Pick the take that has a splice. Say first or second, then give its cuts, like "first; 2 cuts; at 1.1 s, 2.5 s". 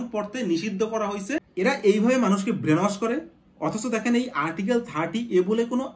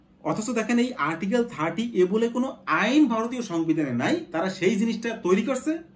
first; 1 cut; at 1.5 s